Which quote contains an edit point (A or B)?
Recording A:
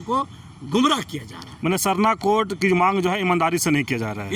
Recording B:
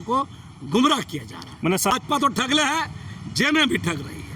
B